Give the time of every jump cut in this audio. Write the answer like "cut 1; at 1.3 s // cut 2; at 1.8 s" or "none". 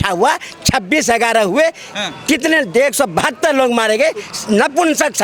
none